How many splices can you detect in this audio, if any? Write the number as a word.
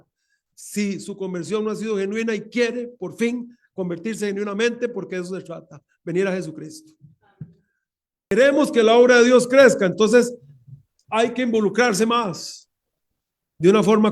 one